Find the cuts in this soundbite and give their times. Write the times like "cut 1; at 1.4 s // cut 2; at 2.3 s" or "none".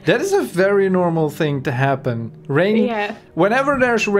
none